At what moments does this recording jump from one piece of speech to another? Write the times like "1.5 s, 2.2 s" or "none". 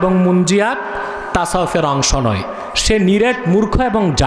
none